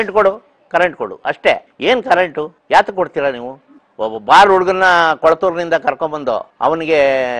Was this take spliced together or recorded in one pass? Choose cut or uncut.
cut